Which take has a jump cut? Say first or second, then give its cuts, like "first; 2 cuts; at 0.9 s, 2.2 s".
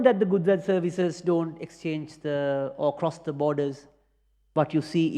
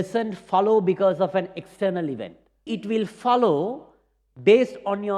second; 1 cut; at 2.7 s